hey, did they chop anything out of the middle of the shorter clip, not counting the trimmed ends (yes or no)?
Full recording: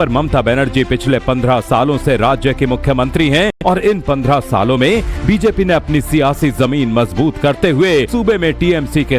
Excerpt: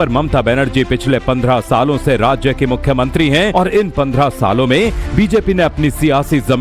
yes